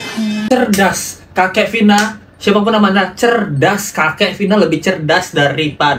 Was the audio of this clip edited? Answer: no; 0 cuts

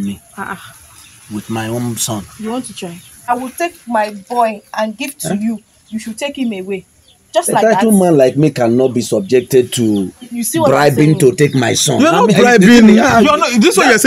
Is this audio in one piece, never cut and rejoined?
no; 1 cut; at 3.3 s

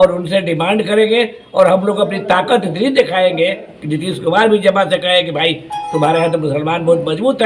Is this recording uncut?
yes; 0 cuts

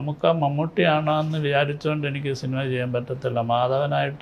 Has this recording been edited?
no; 0 cuts

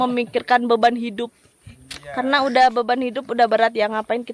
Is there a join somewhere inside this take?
no; 0 cuts

